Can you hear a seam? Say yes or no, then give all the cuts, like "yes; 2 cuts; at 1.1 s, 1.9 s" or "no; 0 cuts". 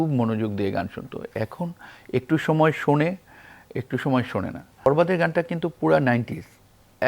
yes; 1 cut; at 4.9 s